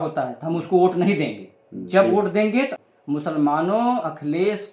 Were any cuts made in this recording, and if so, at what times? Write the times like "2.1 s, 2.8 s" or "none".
2.8 s